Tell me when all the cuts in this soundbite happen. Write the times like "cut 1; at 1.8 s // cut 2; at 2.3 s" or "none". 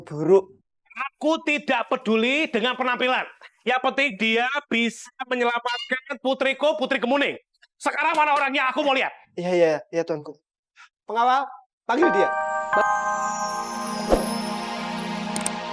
cut 1; at 12.3 s